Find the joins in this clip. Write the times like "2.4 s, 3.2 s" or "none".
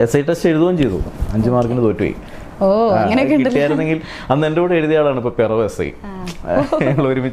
none